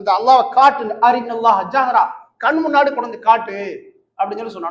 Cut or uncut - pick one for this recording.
uncut